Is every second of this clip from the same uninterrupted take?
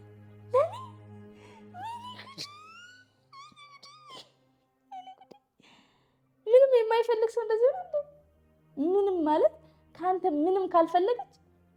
yes; 0 cuts

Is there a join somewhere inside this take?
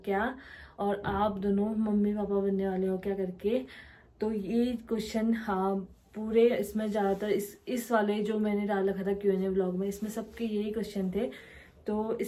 no; 0 cuts

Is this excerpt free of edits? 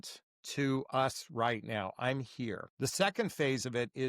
no; 1 cut; at 2.7 s

